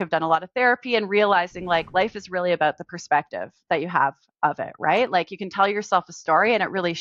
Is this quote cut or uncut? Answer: uncut